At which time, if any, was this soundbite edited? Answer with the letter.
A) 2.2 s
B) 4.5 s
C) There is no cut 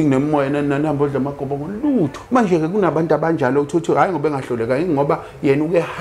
A